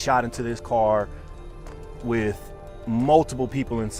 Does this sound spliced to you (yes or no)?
no